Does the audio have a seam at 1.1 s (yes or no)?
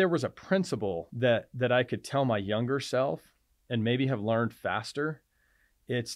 yes